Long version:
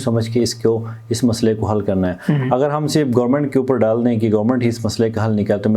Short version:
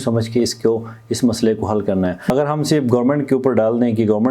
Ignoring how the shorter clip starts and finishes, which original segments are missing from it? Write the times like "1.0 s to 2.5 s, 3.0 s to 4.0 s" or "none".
2.3 s to 2.6 s